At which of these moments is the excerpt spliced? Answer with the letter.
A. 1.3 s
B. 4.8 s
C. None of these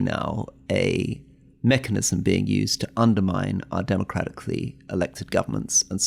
C